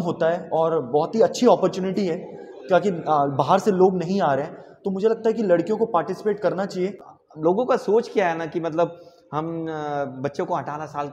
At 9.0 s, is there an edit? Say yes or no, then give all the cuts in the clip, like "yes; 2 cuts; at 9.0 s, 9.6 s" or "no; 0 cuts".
no; 1 cut; at 7.1 s